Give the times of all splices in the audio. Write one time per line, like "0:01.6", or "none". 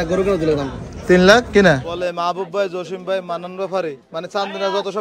0:01.9